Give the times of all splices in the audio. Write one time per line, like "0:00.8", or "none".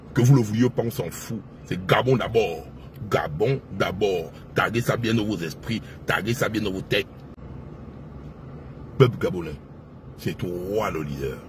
0:07.2